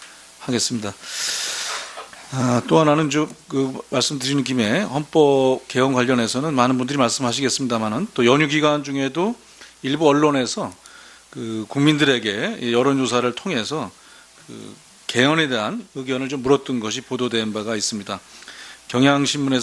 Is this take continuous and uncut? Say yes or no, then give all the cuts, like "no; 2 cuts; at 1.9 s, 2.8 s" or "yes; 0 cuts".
no; 1 cut; at 8.8 s